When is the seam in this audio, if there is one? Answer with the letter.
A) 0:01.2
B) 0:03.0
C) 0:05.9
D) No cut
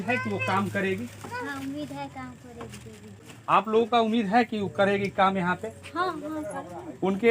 B